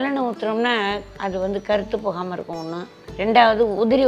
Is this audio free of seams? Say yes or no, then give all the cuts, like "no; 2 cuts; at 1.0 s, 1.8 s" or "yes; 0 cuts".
no; 1 cut; at 1.1 s